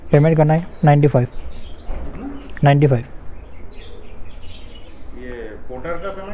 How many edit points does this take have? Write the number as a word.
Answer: zero